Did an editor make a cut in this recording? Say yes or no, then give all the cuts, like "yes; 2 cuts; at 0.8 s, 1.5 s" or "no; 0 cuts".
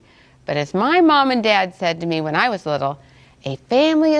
yes; 1 cut; at 1.7 s